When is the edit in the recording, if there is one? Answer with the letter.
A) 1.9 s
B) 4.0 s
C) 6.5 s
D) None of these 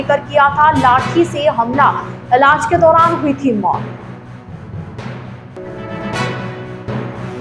D